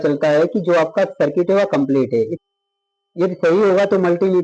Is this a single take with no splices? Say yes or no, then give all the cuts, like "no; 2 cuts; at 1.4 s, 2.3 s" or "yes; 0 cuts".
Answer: no; 1 cut; at 2.4 s